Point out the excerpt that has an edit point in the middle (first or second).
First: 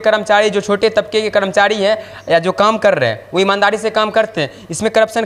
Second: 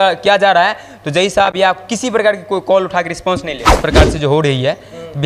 second